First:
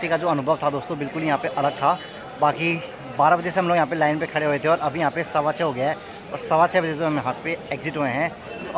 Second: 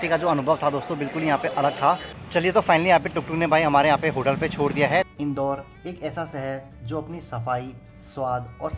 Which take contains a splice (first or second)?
second